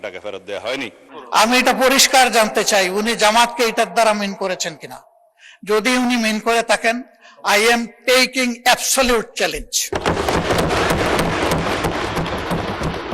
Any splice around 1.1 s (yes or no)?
yes